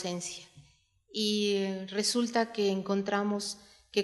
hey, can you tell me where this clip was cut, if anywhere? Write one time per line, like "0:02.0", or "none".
0:02.8